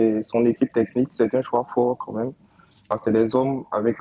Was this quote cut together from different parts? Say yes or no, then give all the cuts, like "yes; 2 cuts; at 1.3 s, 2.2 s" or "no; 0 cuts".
yes; 1 cut; at 2.9 s